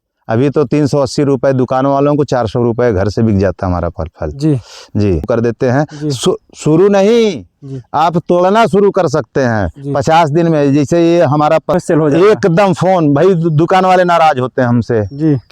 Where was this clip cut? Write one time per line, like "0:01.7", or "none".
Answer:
0:05.3
0:11.7